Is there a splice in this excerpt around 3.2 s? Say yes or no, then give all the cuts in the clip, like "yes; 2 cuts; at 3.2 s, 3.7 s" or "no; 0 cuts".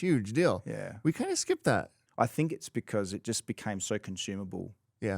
no; 1 cut; at 2.0 s